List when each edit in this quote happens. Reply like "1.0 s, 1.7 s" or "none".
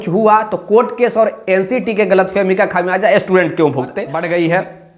4.1 s